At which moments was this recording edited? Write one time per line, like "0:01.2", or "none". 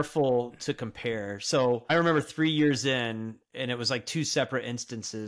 0:01.9